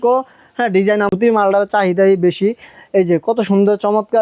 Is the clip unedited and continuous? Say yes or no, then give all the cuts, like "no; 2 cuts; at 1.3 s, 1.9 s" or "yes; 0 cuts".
no; 1 cut; at 1.1 s